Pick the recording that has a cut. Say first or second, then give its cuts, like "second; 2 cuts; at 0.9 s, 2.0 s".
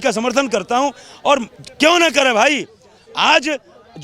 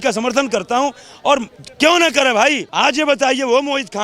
second; 1 cut; at 2.6 s